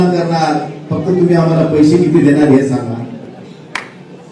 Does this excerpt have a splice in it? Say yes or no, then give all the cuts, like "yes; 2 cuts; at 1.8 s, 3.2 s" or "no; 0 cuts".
no; 0 cuts